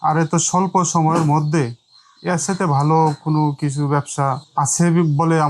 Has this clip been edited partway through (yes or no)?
yes